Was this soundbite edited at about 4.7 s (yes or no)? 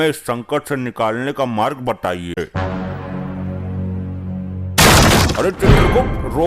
no